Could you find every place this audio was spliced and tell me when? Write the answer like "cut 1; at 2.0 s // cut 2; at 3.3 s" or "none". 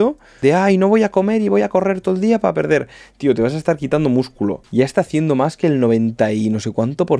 cut 1; at 4.6 s